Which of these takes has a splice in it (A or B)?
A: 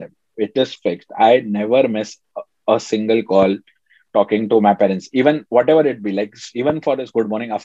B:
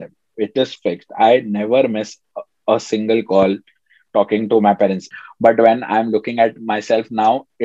B